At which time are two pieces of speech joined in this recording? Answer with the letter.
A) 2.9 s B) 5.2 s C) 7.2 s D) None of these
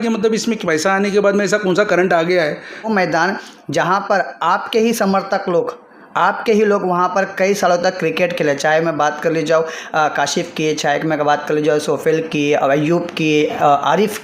A